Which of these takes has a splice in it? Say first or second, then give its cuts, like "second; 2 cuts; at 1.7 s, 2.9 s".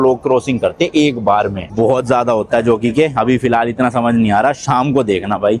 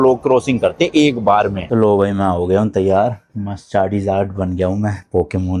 second; 1 cut; at 1.6 s